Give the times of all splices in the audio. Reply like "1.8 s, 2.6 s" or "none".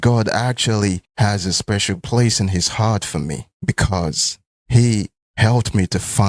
none